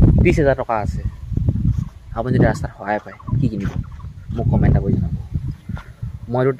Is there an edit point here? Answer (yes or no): no